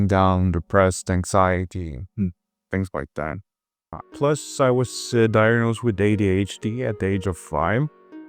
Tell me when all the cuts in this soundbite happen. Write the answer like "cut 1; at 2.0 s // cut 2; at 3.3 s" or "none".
cut 1; at 4.1 s